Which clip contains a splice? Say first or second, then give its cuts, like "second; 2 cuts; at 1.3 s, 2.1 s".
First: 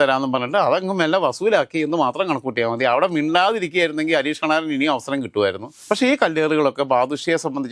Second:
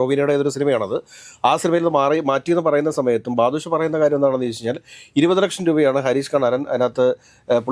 first; 1 cut; at 5.7 s